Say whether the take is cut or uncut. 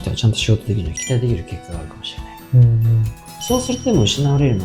cut